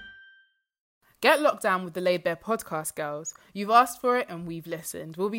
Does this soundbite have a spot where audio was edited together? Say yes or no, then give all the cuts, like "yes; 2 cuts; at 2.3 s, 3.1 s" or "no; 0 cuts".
yes; 1 cut; at 1.1 s